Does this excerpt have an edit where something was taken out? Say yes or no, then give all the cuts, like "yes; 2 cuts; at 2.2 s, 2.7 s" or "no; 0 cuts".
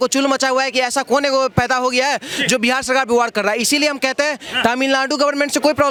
no; 0 cuts